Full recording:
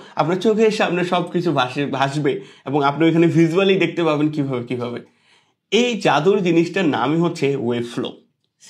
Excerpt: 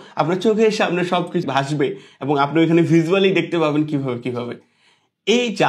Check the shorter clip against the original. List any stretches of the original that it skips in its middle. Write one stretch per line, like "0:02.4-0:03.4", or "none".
0:01.4-0:01.9